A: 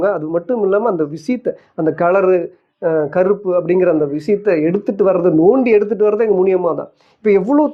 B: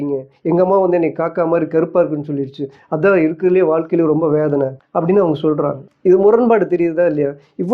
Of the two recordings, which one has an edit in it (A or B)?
B